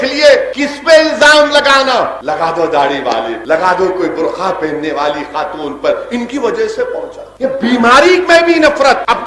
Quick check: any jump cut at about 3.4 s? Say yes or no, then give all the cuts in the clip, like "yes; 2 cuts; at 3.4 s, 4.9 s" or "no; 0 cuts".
yes; 1 cut; at 3.4 s